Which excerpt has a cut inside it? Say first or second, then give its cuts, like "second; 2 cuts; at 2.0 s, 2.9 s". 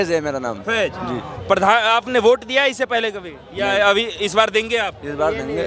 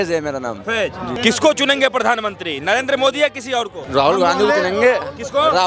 second; 2 cuts; at 1.1 s, 3.8 s